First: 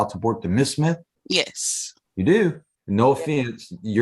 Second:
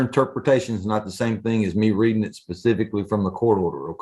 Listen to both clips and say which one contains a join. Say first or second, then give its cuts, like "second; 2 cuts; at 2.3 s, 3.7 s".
first; 2 cuts; at 1.1 s, 2.7 s